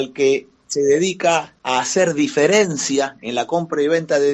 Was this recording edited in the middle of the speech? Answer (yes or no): yes